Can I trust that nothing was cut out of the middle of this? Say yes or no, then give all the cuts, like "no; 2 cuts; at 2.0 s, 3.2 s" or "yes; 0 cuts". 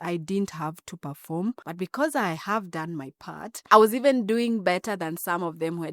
no; 2 cuts; at 1.7 s, 3.5 s